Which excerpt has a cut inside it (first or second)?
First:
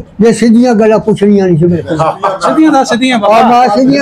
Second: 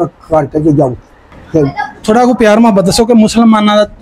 second